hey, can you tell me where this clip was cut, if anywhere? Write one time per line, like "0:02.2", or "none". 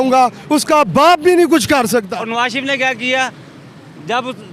0:02.2